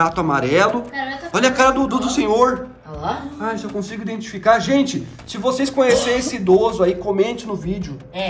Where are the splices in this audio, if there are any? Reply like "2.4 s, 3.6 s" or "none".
none

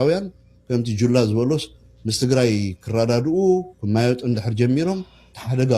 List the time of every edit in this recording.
none

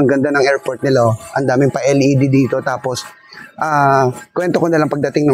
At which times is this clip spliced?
none

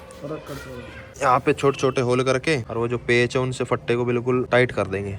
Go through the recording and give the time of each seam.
1.2 s, 2.7 s, 4.5 s

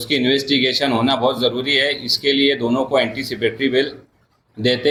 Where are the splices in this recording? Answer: none

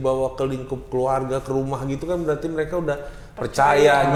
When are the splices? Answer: none

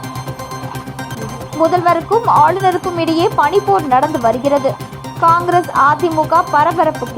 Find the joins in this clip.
1.3 s

